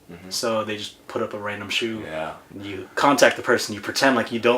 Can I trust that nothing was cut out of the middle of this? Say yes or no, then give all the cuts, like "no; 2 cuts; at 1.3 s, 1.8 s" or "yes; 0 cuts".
no; 1 cut; at 2.4 s